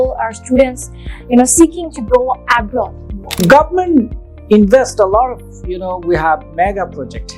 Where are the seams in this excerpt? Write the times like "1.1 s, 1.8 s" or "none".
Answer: 3.3 s